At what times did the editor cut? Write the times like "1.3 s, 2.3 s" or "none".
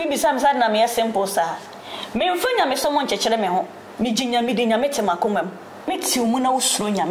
5.9 s